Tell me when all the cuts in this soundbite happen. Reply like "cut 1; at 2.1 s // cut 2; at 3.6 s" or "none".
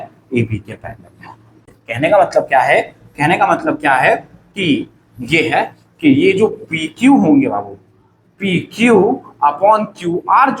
cut 1; at 1.6 s